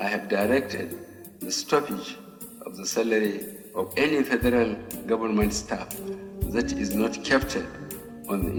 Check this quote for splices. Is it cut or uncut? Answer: uncut